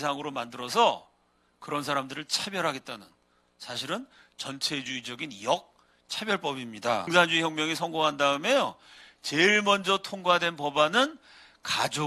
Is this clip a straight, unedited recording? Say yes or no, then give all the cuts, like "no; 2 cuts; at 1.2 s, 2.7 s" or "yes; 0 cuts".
no; 1 cut; at 7.1 s